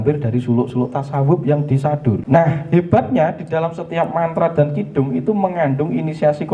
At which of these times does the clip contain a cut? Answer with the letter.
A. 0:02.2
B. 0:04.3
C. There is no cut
A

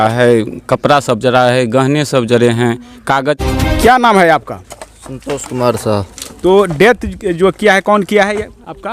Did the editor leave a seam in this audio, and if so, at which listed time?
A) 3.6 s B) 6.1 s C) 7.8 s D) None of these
A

